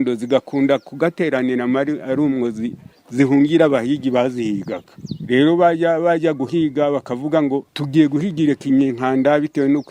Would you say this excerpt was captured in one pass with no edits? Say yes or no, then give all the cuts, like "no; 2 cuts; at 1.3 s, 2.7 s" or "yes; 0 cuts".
yes; 0 cuts